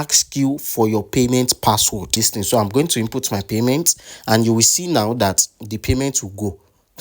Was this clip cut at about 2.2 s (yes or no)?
yes